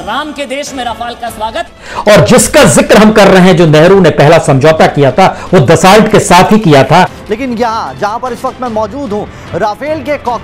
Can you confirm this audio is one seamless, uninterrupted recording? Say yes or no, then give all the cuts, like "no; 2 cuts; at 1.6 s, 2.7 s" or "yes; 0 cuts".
no; 2 cuts; at 1.7 s, 7.2 s